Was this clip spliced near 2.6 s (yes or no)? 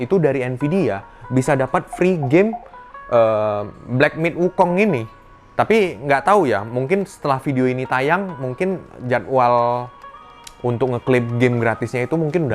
no